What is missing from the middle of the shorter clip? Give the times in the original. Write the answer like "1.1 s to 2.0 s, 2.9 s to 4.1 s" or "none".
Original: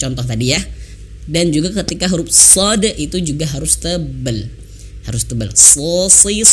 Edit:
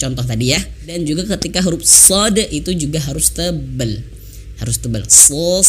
1.0 s to 1.4 s